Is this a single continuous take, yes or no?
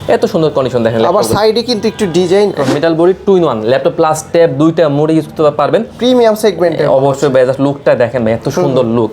no